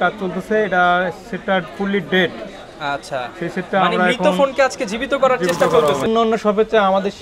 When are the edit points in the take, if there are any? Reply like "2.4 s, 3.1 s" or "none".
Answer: 6.1 s